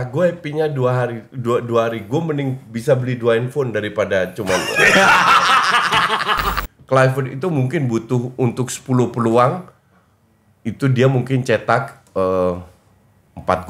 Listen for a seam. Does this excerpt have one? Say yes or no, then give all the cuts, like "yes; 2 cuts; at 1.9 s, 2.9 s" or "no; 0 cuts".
yes; 1 cut; at 6.5 s